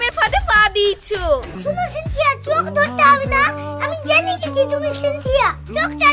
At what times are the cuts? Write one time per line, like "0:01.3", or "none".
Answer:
0:01.5